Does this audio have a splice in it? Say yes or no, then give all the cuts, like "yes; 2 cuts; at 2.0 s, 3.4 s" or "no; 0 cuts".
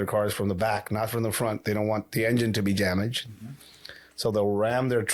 no; 0 cuts